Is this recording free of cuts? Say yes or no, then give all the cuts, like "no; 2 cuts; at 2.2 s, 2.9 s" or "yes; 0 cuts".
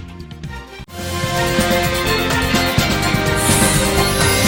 yes; 0 cuts